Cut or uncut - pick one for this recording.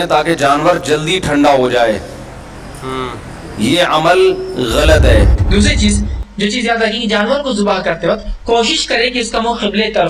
cut